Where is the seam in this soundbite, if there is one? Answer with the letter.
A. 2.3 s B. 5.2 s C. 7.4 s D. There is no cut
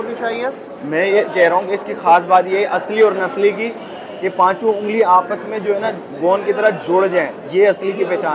C